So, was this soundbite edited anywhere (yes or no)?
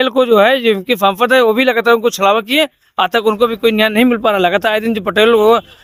no